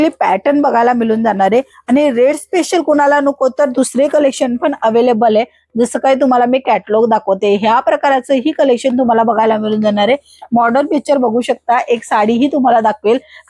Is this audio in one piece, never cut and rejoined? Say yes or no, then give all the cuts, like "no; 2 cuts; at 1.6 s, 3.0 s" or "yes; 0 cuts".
yes; 0 cuts